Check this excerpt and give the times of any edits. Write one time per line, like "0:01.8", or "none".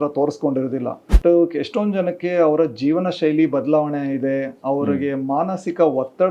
0:01.0